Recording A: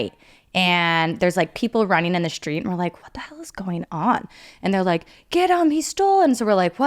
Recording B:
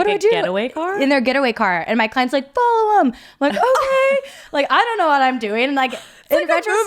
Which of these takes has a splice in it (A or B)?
A